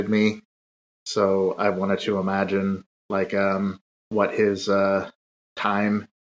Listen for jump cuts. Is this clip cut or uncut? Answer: uncut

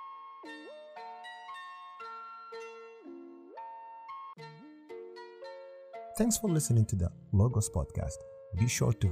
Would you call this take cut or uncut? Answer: cut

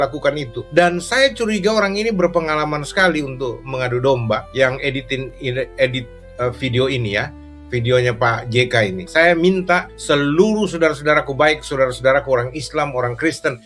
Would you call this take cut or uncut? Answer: uncut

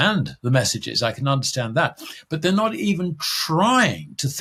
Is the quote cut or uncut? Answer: uncut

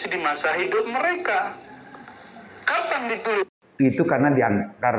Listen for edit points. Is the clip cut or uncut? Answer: cut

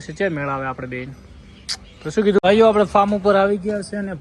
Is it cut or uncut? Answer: cut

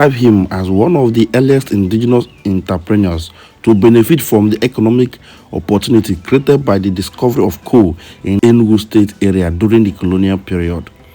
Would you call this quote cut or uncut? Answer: cut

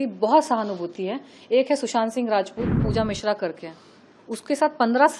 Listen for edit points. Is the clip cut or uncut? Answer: cut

